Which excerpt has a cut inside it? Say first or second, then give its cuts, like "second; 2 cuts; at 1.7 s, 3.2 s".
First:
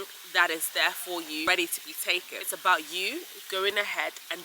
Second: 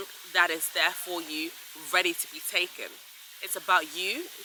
first; 2 cuts; at 1.5 s, 2.4 s